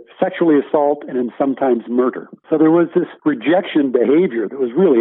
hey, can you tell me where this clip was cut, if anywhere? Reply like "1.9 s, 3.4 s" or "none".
2.3 s, 3.1 s